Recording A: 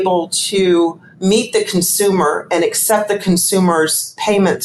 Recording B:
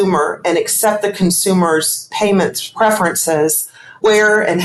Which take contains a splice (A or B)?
A